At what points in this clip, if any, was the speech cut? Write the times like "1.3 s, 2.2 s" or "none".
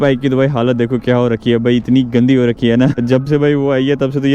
2.9 s